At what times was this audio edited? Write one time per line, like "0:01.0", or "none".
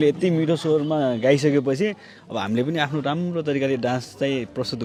none